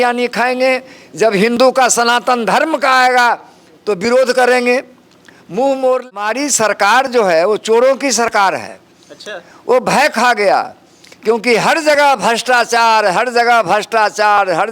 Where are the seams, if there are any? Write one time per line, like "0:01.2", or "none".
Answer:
0:06.1